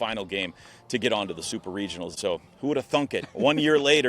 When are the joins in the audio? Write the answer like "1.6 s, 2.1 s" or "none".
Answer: 2.1 s

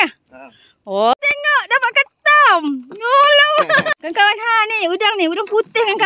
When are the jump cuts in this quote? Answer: 1.1 s, 3.9 s

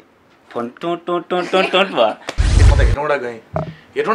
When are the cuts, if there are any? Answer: 2.6 s

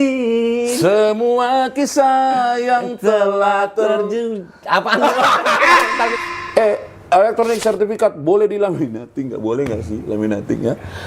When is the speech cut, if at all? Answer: 6.1 s

